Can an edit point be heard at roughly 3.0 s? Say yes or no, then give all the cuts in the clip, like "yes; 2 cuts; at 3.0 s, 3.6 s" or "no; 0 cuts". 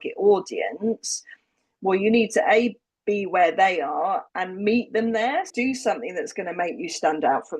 no; 2 cuts; at 4.3 s, 5.5 s